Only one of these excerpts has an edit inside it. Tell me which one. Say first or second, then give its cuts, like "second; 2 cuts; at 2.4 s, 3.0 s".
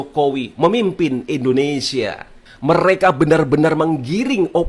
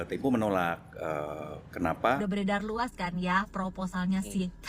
second; 1 cut; at 2.2 s